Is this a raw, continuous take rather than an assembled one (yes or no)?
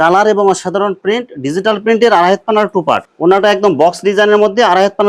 no